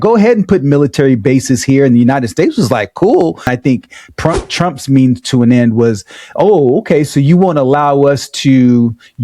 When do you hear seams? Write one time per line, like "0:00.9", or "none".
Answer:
0:03.5